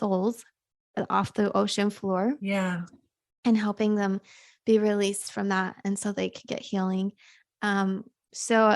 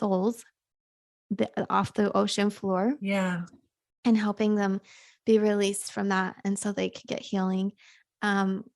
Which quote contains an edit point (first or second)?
first